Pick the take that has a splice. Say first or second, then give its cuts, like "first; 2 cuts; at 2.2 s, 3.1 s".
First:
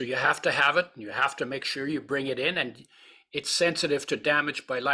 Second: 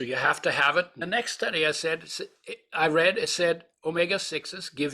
second; 1 cut; at 1.0 s